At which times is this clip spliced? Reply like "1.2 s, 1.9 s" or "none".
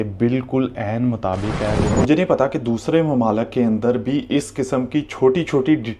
1.9 s